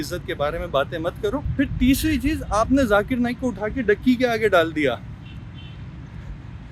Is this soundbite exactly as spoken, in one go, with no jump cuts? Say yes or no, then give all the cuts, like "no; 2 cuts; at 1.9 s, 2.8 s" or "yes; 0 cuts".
yes; 0 cuts